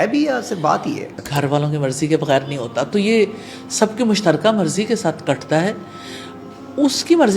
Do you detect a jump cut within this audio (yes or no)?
yes